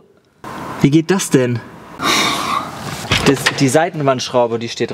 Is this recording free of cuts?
yes; 0 cuts

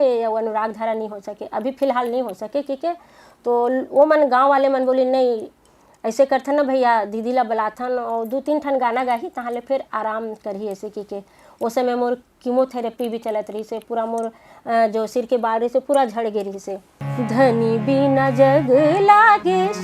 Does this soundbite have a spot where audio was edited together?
yes; 1 cut; at 17.0 s

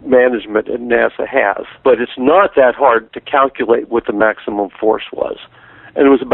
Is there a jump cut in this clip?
no; 0 cuts

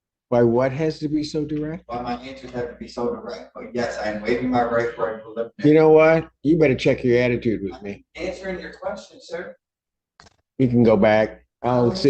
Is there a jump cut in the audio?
no; 0 cuts

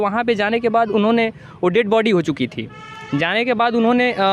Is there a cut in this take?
no; 0 cuts

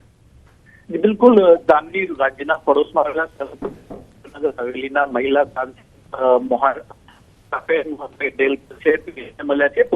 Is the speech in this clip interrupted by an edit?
yes; 1 cut; at 1.8 s

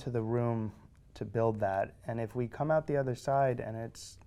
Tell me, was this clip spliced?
no; 0 cuts

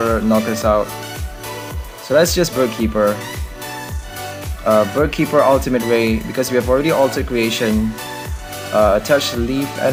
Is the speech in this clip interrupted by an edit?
no; 0 cuts

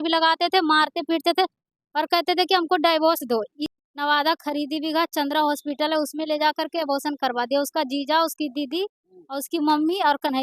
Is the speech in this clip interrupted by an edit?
yes; 1 cut; at 3.6 s

